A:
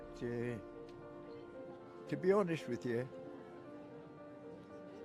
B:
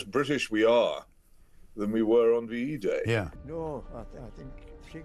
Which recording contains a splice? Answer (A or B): B